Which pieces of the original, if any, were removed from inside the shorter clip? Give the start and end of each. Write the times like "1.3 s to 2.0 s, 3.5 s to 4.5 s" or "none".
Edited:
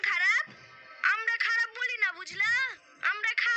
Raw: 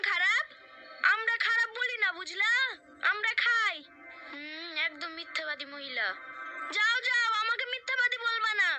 none